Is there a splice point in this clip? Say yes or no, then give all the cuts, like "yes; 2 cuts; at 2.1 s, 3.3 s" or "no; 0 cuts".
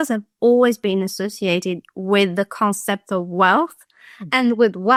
no; 0 cuts